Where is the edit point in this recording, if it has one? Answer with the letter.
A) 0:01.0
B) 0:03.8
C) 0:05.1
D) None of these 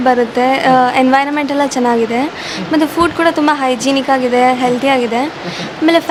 D